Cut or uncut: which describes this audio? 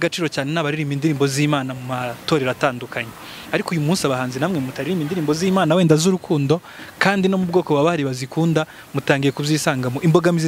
uncut